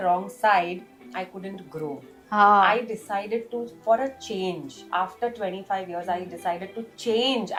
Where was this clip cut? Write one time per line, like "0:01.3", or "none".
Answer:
none